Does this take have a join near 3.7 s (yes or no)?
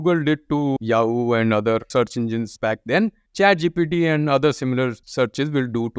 no